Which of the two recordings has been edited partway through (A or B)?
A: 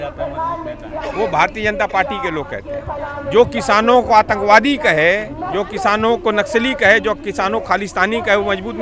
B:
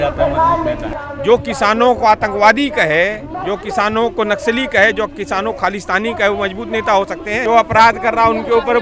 B